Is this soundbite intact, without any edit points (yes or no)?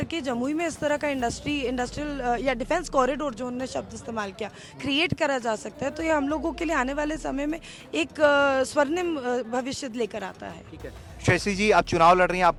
yes